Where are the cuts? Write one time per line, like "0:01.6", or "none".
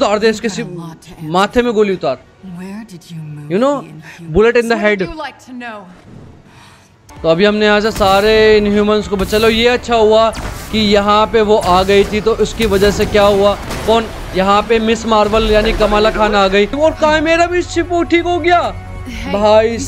0:07.1
0:16.7